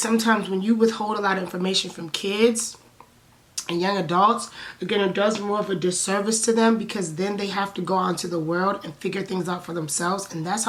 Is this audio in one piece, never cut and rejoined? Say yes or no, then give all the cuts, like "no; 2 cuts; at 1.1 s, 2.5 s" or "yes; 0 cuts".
yes; 0 cuts